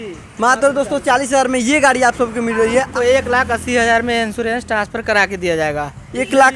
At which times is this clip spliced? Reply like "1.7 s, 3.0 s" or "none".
2.9 s

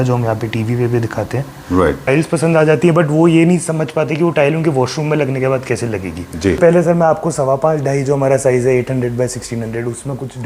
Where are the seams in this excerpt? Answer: 2.1 s, 6.6 s

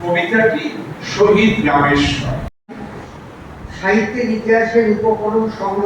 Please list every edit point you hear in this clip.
2.5 s

